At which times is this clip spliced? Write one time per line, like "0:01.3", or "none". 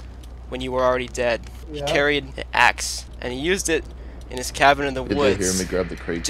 0:01.6
0:02.4
0:03.0